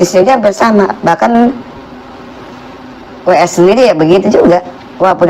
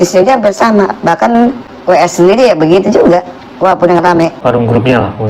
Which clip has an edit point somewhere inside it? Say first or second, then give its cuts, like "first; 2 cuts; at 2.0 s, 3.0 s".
second; 2 cuts; at 1.7 s, 4.4 s